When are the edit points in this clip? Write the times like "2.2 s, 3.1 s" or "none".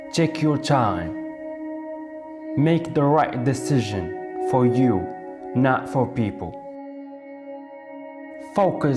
6.4 s, 8.0 s